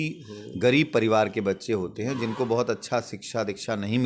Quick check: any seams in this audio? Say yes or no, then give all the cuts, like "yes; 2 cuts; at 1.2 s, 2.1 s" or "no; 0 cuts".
no; 0 cuts